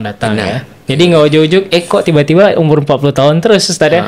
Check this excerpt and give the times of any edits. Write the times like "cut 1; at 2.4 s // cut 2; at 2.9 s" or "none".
none